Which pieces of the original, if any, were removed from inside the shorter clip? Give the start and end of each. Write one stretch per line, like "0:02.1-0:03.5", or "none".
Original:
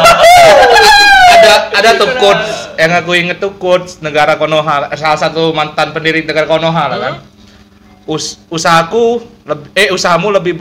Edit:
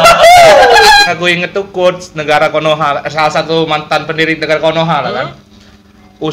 0:01.1-0:02.9

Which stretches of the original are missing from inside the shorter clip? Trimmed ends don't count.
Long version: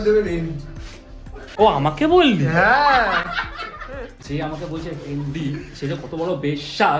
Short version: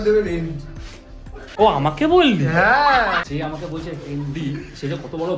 0:03.3-0:04.2

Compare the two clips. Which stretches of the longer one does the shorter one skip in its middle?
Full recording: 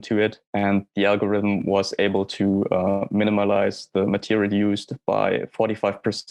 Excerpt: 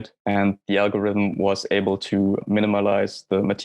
0:02.7-0:03.0

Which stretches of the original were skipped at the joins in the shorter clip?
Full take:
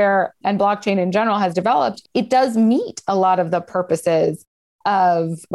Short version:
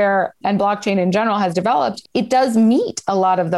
none

